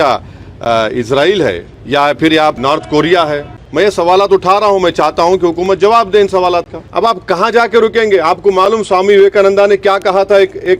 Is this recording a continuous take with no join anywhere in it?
no; 4 cuts; at 1.7 s, 2.6 s, 3.5 s, 6.8 s

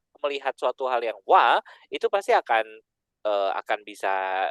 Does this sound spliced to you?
no; 0 cuts

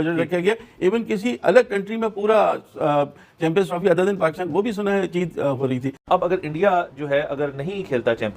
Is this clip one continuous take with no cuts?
yes; 0 cuts

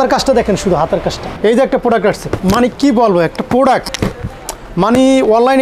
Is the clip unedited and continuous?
no; 1 cut; at 1.3 s

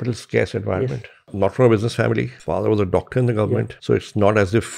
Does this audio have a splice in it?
yes; 3 cuts; at 1.3 s, 2.4 s, 3.7 s

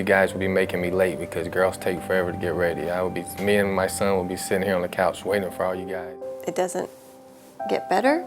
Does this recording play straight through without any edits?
no; 1 cut; at 6.0 s

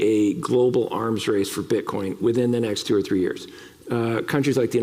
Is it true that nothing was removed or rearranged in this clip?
yes; 0 cuts

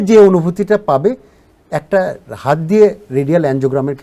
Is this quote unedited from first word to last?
yes; 0 cuts

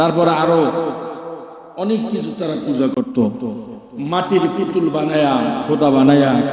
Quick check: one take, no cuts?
yes; 0 cuts

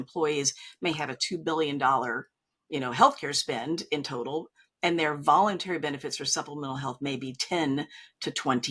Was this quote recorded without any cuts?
yes; 0 cuts

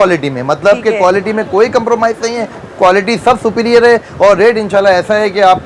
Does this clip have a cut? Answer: no; 0 cuts

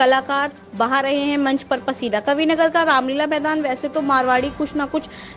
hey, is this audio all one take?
yes; 0 cuts

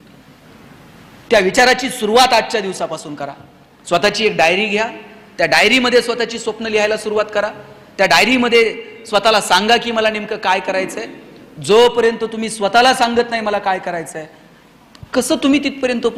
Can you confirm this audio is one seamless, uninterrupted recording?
yes; 0 cuts

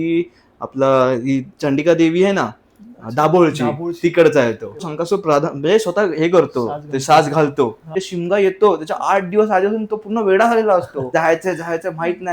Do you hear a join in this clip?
yes; 3 cuts; at 4.9 s, 8.0 s, 11.1 s

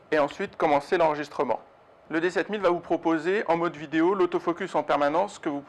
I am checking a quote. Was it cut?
yes; 1 cut; at 3.1 s

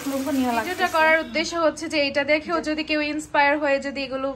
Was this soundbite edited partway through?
yes; 1 cut; at 0.9 s

